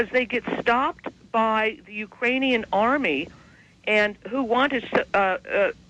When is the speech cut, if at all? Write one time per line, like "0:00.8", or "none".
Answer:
0:03.0